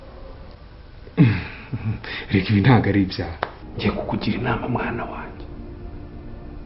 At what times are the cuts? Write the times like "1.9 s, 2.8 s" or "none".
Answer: 3.6 s